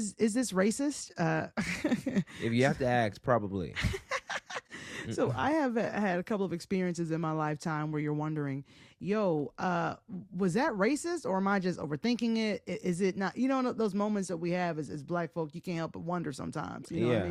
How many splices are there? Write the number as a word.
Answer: zero